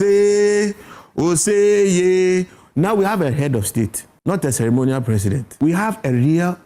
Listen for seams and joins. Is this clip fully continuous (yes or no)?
no